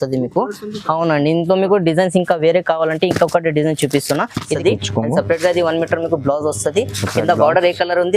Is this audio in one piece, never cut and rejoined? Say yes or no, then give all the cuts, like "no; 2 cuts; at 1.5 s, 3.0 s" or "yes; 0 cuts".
no; 1 cut; at 4.5 s